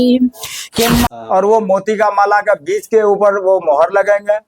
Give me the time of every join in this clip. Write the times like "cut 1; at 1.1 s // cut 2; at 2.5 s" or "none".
cut 1; at 1.0 s